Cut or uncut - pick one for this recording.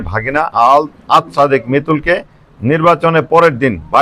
uncut